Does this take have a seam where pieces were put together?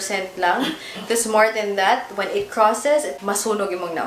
yes; 1 cut; at 3.1 s

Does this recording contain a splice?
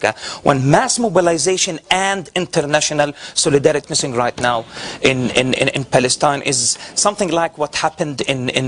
no; 0 cuts

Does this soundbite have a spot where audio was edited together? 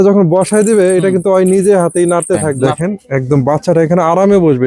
yes; 1 cut; at 2.6 s

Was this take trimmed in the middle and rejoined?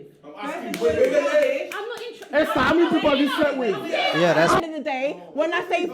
yes; 1 cut; at 4.6 s

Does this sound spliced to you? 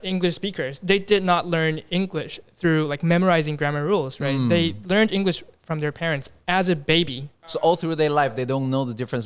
yes; 1 cut; at 7.6 s

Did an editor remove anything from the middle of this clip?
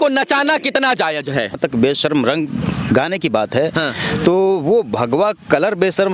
yes; 1 cut; at 1.5 s

